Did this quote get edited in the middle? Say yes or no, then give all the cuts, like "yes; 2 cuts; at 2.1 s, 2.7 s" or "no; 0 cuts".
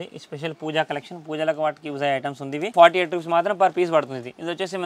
yes; 1 cut; at 2.7 s